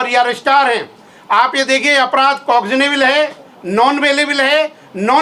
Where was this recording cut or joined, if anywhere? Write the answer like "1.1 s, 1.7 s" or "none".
none